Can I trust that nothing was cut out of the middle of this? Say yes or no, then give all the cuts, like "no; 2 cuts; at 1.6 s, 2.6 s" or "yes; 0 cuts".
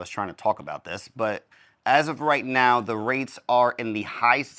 yes; 0 cuts